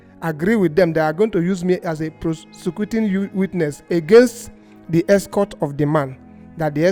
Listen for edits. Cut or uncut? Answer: uncut